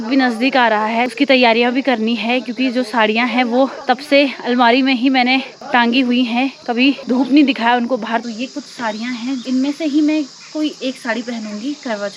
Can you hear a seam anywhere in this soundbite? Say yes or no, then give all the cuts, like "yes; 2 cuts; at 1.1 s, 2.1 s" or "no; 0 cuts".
yes; 6 cuts; at 1.1 s, 3.8 s, 5.5 s, 7.0 s, 8.2 s, 9.4 s